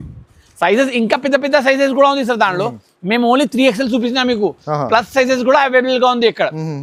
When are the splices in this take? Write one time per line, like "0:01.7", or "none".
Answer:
none